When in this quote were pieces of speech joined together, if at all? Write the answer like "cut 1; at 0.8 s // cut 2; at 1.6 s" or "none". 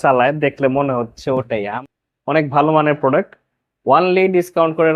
cut 1; at 1.7 s